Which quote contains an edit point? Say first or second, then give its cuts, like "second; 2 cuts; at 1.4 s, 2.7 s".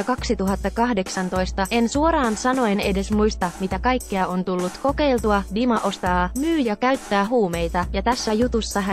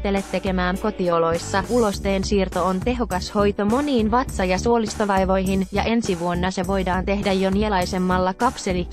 first; 1 cut; at 0.9 s